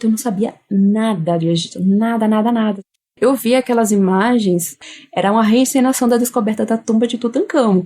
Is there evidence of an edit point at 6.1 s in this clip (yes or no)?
no